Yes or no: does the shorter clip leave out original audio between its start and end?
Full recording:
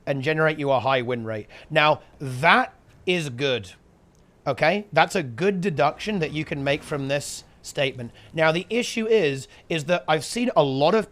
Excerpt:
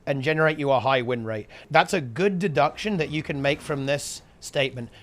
yes